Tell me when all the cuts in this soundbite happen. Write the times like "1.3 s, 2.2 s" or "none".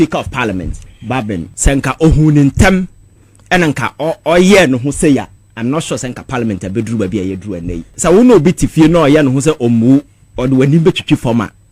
1.5 s, 8.0 s

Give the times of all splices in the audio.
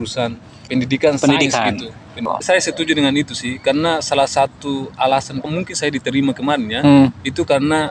2.2 s

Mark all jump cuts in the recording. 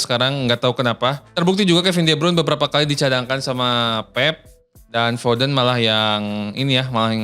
1.2 s

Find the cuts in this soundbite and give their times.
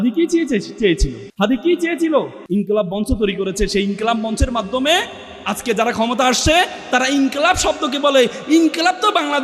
1.2 s, 2.4 s

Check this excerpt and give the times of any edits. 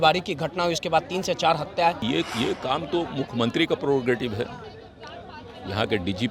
2.0 s

